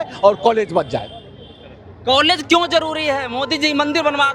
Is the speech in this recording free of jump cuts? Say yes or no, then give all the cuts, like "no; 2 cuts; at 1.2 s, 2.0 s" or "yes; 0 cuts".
yes; 0 cuts